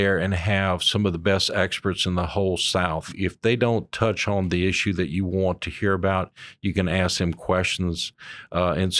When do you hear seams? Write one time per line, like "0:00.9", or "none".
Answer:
0:03.1